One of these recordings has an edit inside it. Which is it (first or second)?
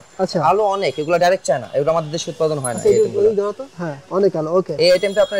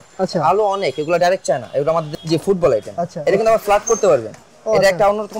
second